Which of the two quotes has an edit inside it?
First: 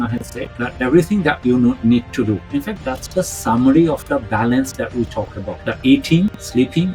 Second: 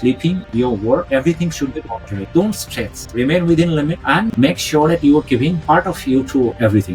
first; 1 cut; at 5.6 s

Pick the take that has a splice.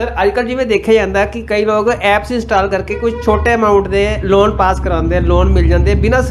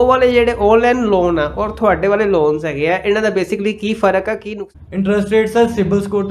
second; 1 cut; at 4.5 s

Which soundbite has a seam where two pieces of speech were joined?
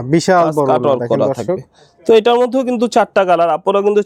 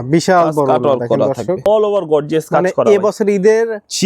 second; 1 cut; at 1.7 s

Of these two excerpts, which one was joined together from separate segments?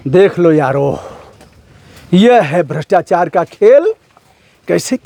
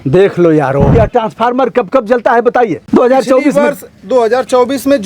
second; 2 cuts; at 0.9 s, 2.8 s

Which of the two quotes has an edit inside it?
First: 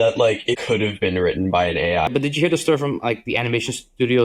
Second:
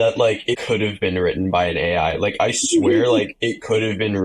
first; 1 cut; at 2.1 s

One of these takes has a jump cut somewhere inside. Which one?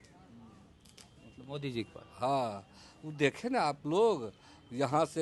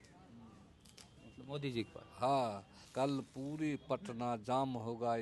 second; 1 cut; at 2.8 s

